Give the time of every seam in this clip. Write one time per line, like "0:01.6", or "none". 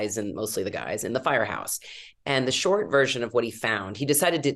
none

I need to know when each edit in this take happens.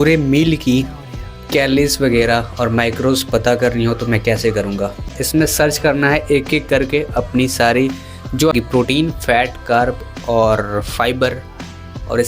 0:05.2
0:08.5

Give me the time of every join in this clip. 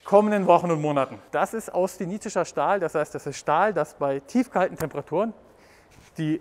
0:01.2

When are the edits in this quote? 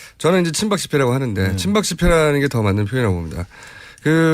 0:03.3

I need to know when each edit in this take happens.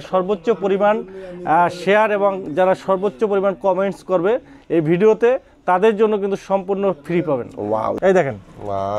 0:07.9

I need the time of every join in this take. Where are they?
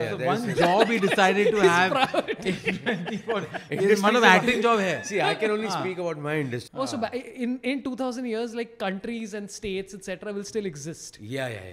0:06.6

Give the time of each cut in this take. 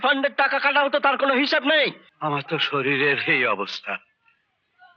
0:02.1

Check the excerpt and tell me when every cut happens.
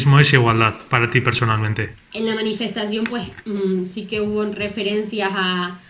0:01.8

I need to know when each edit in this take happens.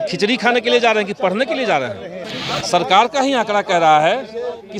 0:02.3

